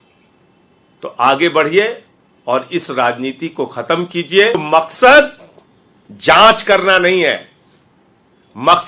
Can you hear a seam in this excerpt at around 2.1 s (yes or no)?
no